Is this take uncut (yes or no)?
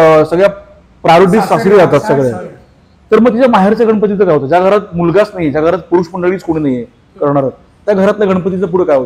yes